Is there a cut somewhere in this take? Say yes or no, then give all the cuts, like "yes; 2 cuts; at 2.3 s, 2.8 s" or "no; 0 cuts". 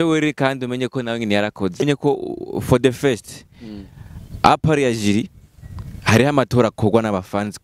yes; 1 cut; at 1.8 s